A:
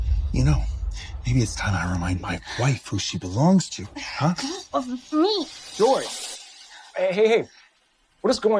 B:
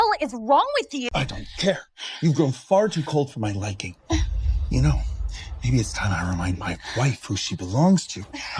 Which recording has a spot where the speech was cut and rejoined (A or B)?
B